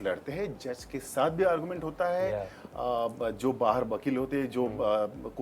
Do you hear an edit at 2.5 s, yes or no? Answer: no